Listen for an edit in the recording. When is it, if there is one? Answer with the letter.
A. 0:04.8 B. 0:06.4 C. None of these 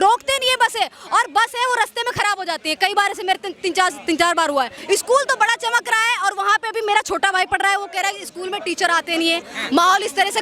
A